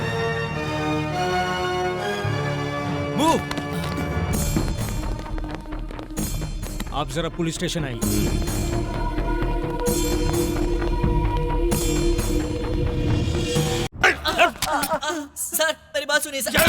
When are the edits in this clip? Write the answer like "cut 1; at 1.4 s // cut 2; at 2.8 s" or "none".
cut 1; at 14.0 s